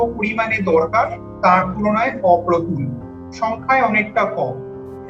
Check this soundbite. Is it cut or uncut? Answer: uncut